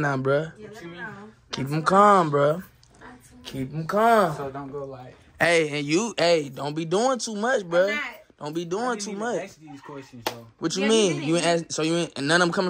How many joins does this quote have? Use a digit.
0